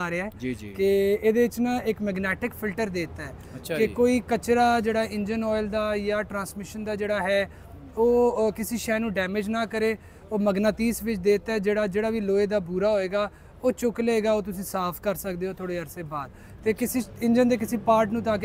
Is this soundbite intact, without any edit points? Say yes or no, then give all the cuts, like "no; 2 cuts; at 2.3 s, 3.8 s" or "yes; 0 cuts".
yes; 0 cuts